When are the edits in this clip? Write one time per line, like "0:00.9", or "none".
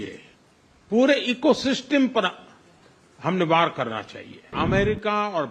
0:04.5